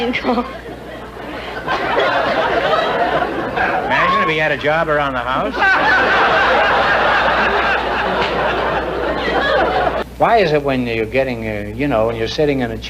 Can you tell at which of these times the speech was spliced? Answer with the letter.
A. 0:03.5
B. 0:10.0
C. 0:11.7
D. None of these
B